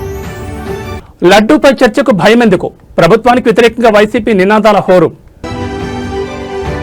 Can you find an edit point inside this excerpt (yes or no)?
yes